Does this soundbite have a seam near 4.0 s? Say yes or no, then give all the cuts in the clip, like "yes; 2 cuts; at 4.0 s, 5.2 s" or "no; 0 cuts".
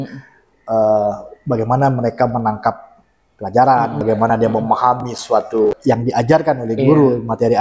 yes; 2 cuts; at 4.0 s, 5.8 s